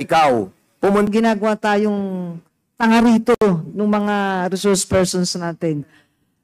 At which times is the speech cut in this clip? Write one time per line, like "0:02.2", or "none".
0:01.1